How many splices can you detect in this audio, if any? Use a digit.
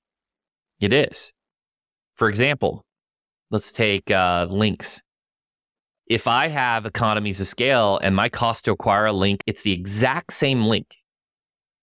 1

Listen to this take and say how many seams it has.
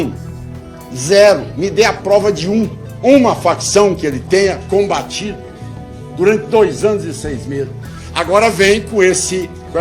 1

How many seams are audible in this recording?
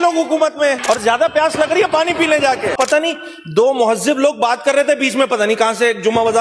2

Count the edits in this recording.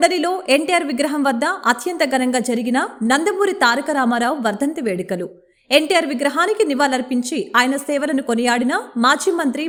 0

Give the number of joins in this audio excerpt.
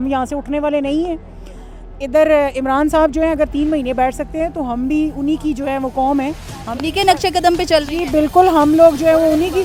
0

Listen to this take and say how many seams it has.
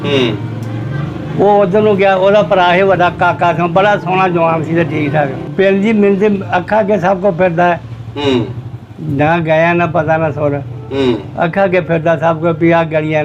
1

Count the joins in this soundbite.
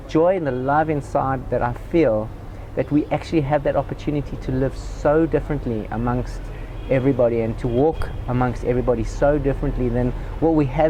0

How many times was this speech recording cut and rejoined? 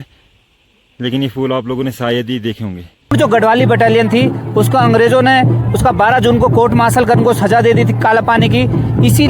1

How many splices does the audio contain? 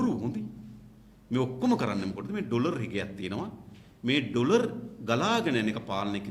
0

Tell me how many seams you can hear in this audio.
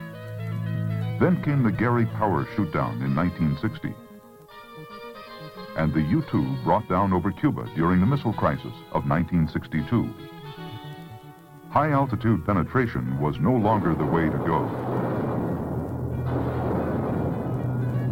1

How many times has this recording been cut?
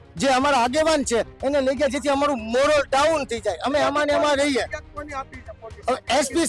0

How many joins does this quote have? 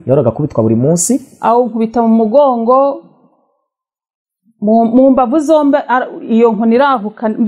1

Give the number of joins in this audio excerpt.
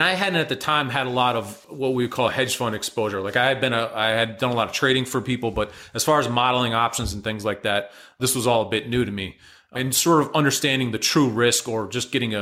1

